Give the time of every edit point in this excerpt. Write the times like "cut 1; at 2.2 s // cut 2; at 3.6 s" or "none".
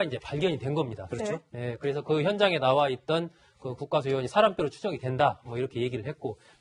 cut 1; at 2.8 s